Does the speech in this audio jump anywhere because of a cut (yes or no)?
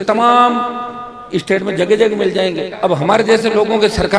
yes